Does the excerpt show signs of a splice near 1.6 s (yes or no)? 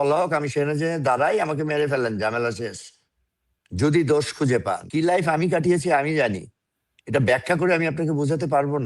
no